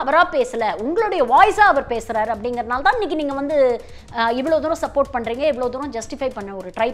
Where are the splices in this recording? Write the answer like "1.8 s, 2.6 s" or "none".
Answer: none